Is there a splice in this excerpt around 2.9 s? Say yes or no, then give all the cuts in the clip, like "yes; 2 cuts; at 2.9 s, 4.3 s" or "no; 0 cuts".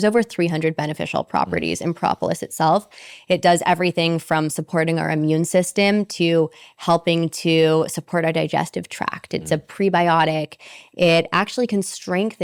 no; 0 cuts